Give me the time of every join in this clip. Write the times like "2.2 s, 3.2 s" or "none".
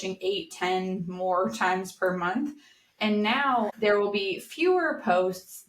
3.7 s